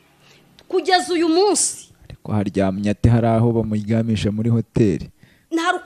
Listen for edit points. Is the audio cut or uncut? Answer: uncut